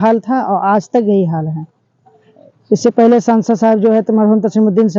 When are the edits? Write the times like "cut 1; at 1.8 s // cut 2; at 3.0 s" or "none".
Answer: none